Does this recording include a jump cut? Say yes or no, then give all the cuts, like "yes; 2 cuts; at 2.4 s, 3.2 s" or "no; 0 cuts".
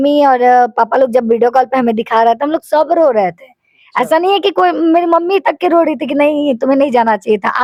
no; 0 cuts